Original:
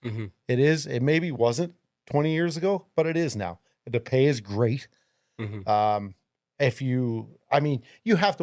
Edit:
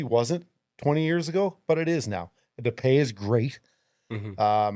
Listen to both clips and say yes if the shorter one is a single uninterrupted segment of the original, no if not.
yes